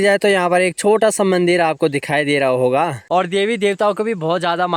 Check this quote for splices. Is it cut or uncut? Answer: cut